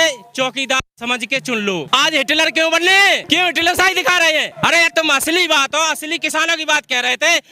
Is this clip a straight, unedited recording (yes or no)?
no